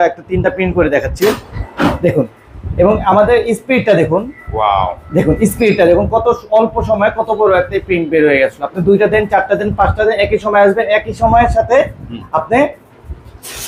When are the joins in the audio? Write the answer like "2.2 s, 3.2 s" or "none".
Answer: none